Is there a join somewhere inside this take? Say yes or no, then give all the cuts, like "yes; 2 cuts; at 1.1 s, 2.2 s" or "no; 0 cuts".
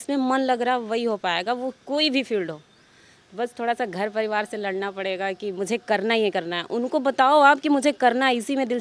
no; 0 cuts